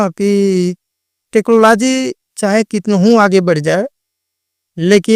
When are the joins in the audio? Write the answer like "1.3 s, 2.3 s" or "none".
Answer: none